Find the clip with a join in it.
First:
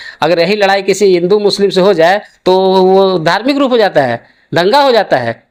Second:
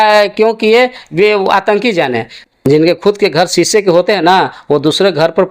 second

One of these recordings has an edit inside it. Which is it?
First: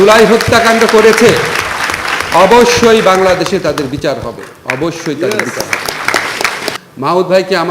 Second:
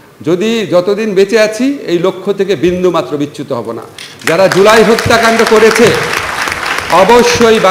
first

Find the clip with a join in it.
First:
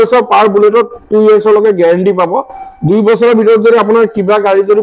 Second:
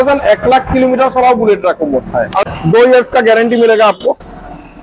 second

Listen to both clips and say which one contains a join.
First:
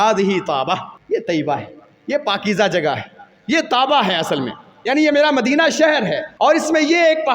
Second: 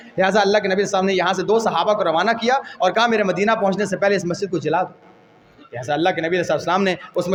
first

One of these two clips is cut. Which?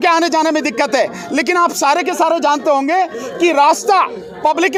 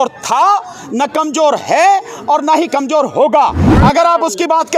second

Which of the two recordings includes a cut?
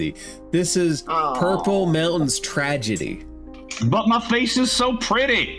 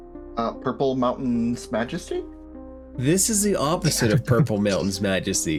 first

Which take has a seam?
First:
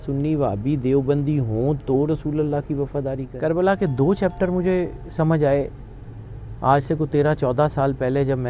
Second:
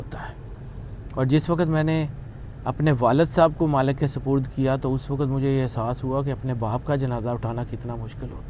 first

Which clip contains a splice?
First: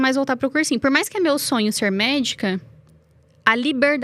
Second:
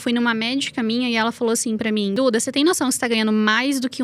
second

